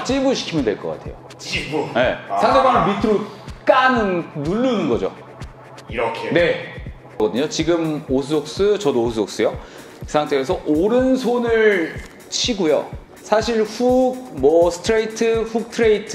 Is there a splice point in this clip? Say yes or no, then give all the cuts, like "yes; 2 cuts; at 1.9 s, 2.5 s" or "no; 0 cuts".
yes; 1 cut; at 7.2 s